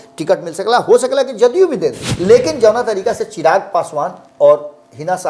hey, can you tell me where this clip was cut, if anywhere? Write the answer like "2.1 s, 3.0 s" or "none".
2.1 s

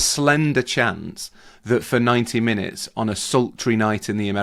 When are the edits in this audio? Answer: none

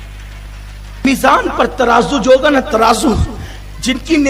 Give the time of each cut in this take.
1.0 s

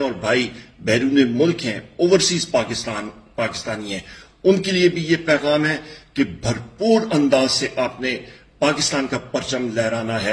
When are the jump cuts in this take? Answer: none

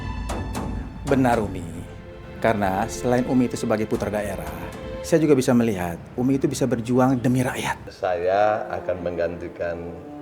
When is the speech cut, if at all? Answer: 7.8 s

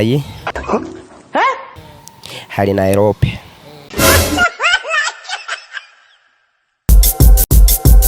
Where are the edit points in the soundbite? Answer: 6.9 s

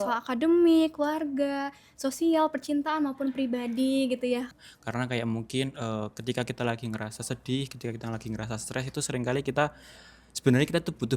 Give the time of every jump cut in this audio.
4.5 s

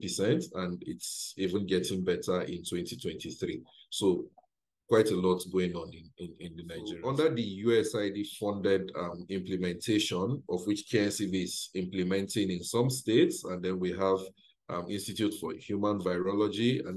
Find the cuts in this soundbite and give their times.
7.0 s

